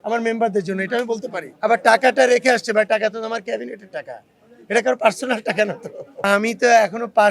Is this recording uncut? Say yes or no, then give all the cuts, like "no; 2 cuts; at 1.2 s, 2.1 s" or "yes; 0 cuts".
no; 2 cuts; at 1.4 s, 6.3 s